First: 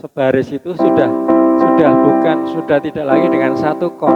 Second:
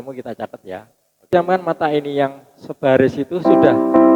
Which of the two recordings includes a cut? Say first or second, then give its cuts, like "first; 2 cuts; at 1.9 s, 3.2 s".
second; 1 cut; at 1.3 s